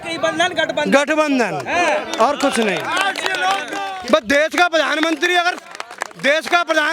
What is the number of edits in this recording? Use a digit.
1